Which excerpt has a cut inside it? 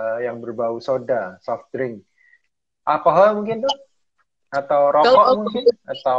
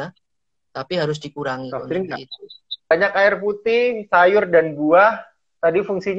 second; 1 cut; at 2.9 s

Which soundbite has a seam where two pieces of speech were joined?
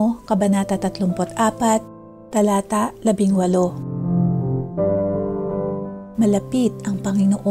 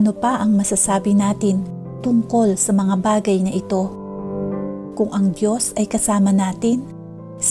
first; 2 cuts; at 3.9 s, 6.0 s

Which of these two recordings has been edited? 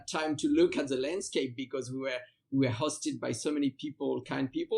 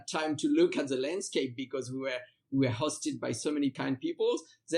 second; 1 cut; at 3.8 s

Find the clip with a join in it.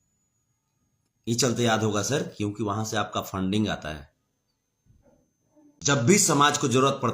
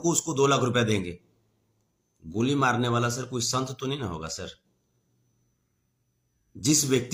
first; 1 cut; at 6.0 s

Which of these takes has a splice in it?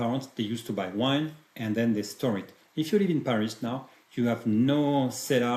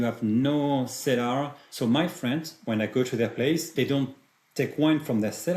second; 2 cuts; at 2.5 s, 3.7 s

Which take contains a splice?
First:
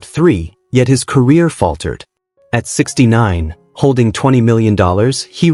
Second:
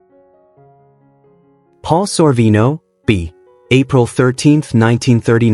second; 1 cut; at 1.8 s

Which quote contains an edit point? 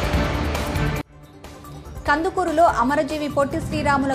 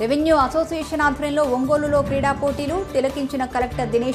first; 1 cut; at 1.1 s

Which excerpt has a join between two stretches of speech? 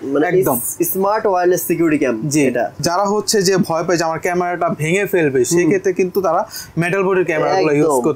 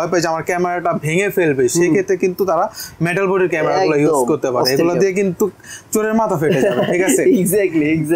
first; 1 cut; at 2.8 s

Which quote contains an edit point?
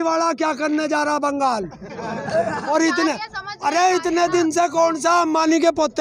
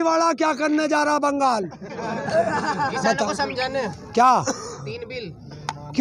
first; 1 cut; at 2.6 s

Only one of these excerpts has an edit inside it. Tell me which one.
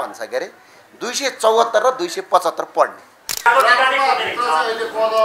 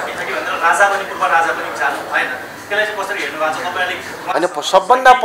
first; 1 cut; at 3.3 s

